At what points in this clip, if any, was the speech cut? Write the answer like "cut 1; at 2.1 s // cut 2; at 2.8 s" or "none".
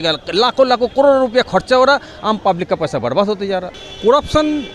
cut 1; at 3.8 s